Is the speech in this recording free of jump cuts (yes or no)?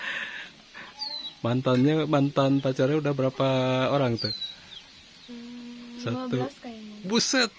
yes